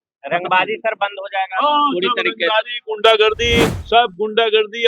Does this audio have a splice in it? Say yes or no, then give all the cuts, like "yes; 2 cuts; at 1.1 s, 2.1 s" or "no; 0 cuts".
yes; 1 cut; at 3.8 s